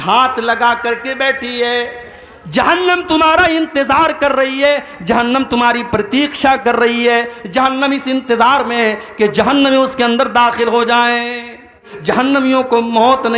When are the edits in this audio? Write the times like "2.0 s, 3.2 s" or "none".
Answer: 11.9 s